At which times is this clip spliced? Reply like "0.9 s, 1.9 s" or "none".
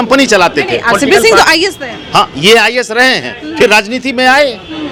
none